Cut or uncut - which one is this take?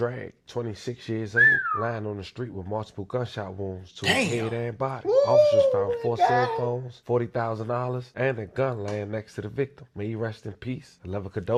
uncut